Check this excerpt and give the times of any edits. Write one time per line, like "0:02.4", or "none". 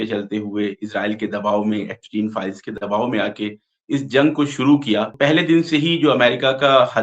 0:05.1